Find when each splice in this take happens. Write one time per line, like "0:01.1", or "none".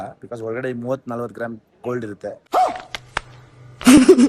none